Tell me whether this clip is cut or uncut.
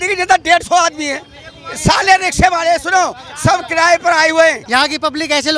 cut